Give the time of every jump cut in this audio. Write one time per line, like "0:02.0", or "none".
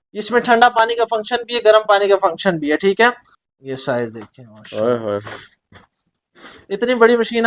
0:03.2